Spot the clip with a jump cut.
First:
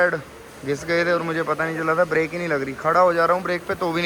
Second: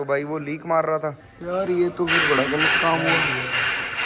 second; 1 cut; at 1.3 s

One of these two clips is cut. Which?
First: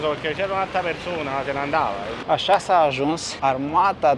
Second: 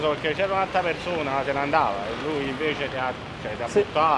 first; 1 cut; at 2.2 s

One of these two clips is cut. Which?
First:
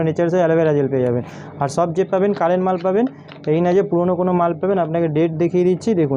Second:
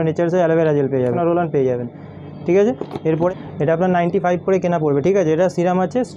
second; 2 cuts; at 1.1 s, 3.3 s

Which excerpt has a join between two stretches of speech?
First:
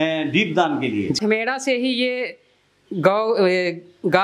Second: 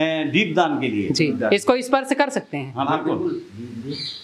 first; 1 cut; at 1.2 s

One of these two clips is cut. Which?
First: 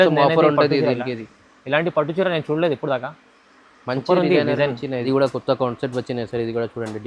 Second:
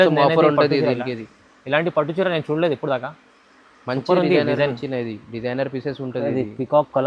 first; 1 cut; at 5.0 s

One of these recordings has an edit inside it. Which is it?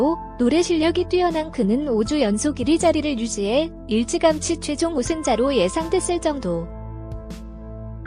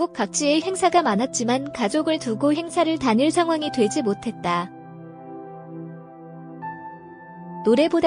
first; 1 cut; at 6.7 s

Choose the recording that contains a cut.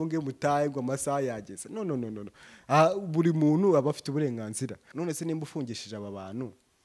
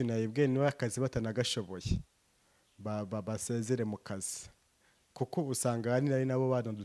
first; 1 cut; at 4.9 s

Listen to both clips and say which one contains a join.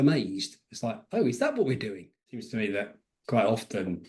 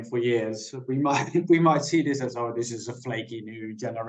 first; 1 cut; at 2.5 s

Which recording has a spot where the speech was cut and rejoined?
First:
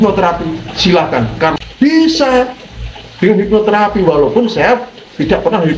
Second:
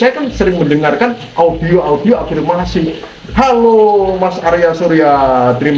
first; 1 cut; at 1.6 s

